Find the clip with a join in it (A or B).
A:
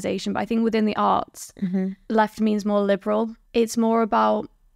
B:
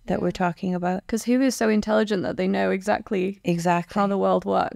A